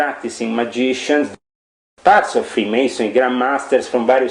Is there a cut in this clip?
yes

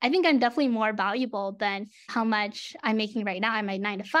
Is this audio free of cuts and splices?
yes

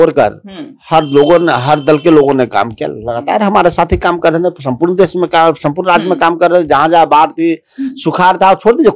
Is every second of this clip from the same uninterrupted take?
yes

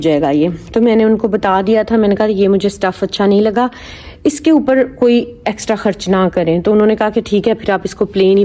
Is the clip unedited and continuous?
yes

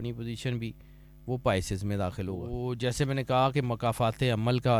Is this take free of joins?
no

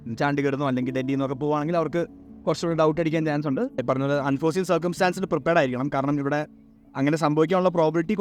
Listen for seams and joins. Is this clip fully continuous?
no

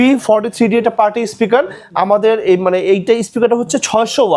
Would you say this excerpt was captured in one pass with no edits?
yes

